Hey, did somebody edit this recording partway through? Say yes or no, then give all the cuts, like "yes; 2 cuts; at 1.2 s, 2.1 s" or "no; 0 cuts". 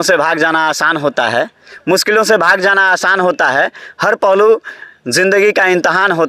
no; 0 cuts